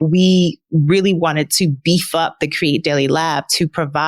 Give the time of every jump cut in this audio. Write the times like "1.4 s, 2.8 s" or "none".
none